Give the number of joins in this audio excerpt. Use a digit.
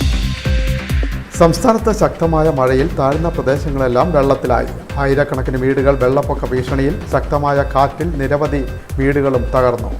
1